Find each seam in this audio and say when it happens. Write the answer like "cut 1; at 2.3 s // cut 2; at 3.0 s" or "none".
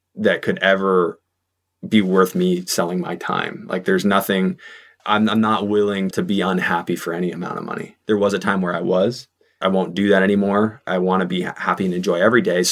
cut 1; at 6.1 s // cut 2; at 7.9 s // cut 3; at 9.5 s